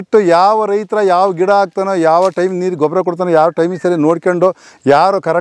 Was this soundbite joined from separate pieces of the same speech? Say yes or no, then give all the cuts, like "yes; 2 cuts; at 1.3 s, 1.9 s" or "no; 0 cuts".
no; 0 cuts